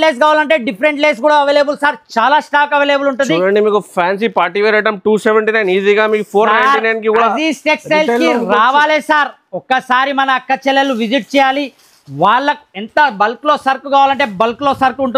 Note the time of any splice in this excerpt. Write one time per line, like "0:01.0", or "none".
none